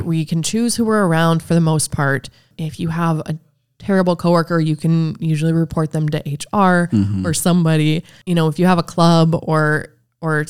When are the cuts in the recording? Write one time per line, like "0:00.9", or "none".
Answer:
0:02.5
0:08.1